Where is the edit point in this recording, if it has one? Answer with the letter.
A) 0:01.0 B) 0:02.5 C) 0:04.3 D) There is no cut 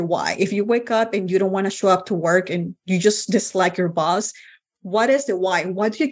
D